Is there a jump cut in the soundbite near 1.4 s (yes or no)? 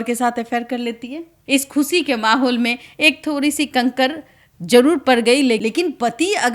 yes